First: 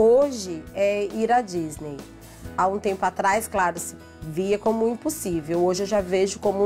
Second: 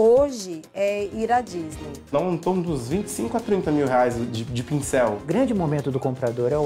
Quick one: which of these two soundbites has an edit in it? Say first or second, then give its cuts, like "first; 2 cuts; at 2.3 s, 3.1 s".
second; 2 cuts; at 2.1 s, 5.2 s